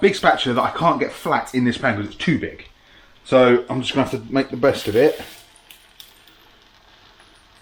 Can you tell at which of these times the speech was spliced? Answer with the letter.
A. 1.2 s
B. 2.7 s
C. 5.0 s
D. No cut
D